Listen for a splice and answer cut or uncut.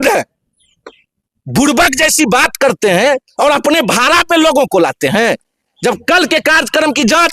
uncut